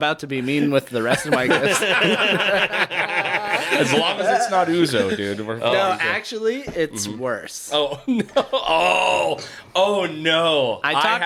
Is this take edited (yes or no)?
no